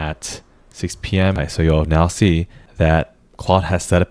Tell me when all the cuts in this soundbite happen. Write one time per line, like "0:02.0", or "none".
0:01.4
0:02.6